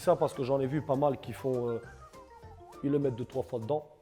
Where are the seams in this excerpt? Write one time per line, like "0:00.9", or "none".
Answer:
none